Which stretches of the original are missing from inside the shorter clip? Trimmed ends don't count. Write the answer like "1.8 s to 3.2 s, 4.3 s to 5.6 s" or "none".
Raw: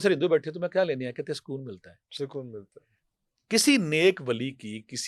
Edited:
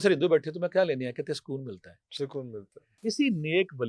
2.8 s to 3.3 s